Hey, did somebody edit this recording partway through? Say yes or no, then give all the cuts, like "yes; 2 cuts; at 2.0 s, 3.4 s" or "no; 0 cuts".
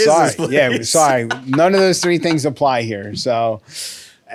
no; 0 cuts